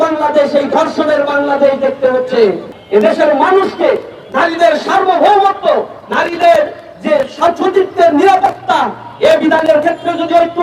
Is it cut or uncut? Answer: cut